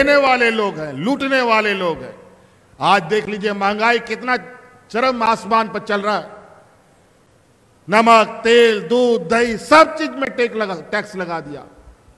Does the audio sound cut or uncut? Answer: uncut